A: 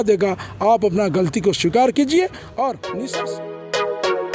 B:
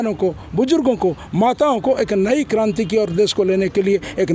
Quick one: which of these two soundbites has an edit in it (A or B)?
A